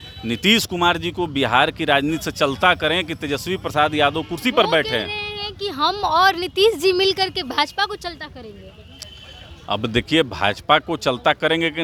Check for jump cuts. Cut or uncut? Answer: uncut